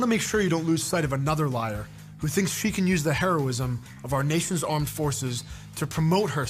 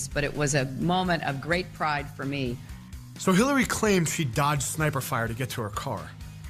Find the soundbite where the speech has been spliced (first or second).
first